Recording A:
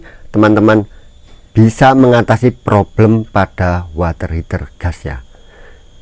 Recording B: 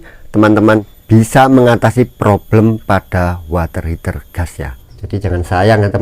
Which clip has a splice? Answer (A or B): B